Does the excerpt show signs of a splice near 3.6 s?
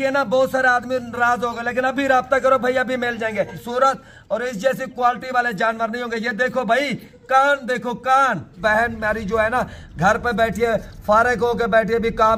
yes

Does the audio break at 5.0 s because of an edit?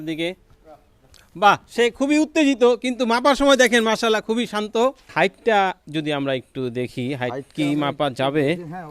yes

